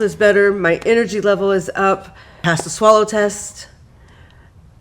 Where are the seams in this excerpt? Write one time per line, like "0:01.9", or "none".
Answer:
0:02.4